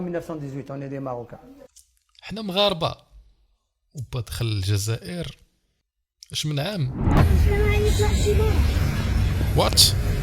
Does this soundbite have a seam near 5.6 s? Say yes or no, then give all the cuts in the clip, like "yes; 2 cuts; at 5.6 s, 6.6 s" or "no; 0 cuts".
no; 1 cut; at 7.0 s